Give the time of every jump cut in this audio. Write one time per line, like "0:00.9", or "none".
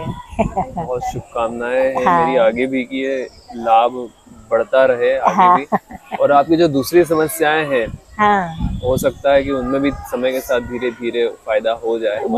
none